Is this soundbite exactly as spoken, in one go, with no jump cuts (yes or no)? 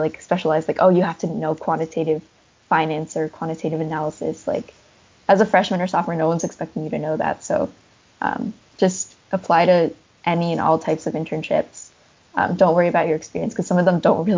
yes